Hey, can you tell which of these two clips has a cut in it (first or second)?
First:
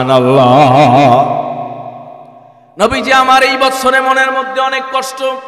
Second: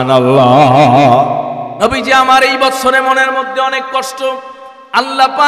second